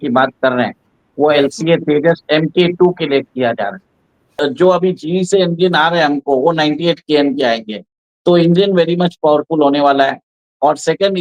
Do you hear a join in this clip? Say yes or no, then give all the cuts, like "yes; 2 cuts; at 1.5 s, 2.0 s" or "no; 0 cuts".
yes; 1 cut; at 4.3 s